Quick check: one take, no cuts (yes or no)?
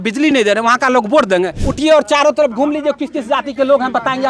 no